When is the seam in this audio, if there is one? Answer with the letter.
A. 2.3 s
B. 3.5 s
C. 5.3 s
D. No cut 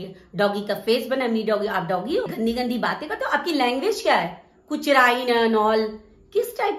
A